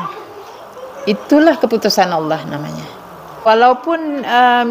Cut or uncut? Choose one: cut